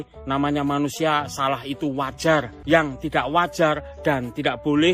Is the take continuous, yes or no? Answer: no